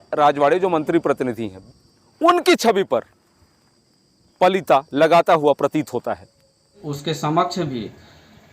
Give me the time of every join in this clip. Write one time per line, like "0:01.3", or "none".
0:01.5
0:06.9